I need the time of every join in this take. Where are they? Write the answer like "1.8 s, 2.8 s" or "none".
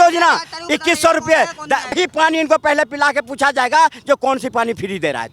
2.0 s